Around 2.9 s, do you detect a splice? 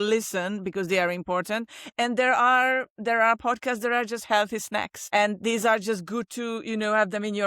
no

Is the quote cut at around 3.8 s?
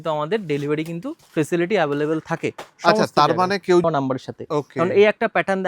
yes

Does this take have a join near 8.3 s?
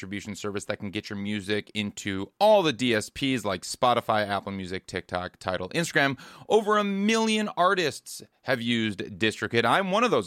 no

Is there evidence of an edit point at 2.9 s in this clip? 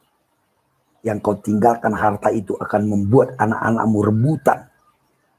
no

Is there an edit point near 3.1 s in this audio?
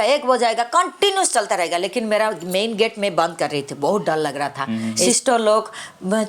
no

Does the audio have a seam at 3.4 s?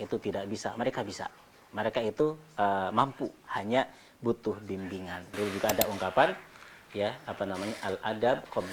no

